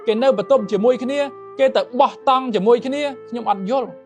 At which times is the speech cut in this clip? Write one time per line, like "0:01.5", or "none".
none